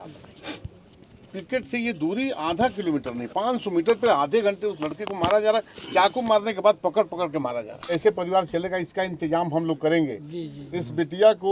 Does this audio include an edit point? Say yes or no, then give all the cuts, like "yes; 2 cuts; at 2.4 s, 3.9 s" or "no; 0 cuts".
yes; 1 cut; at 7.9 s